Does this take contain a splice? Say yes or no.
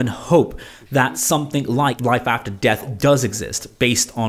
yes